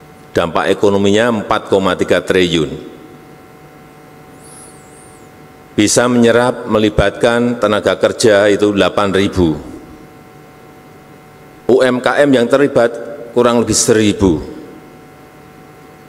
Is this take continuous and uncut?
yes; 0 cuts

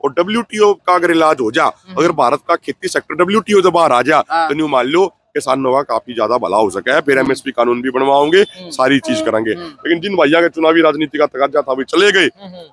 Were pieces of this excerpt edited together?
no; 0 cuts

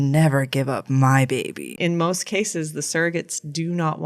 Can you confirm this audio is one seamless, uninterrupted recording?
no; 1 cut; at 1.7 s

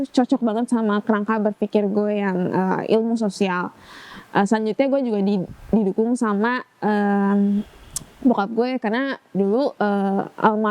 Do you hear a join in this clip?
no; 0 cuts

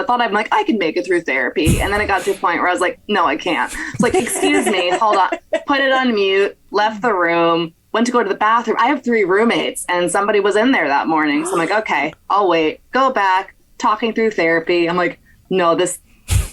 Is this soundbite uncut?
no; 1 cut; at 8.8 s

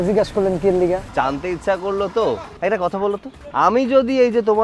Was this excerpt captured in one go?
no; 3 cuts; at 1.1 s, 2.5 s, 3.3 s

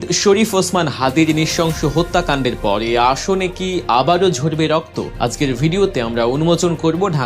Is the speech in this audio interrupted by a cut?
yes; 1 cut; at 5.0 s

